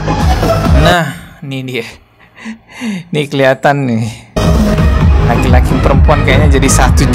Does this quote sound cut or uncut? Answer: uncut